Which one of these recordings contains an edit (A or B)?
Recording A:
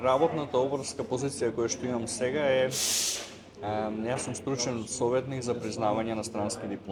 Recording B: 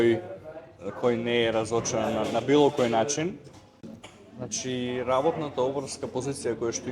B